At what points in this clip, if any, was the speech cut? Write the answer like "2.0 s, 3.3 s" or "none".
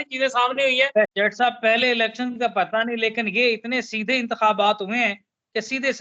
1.1 s